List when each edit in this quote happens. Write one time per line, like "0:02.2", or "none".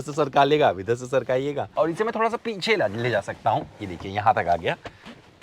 0:01.6